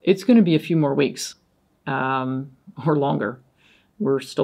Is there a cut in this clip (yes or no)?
no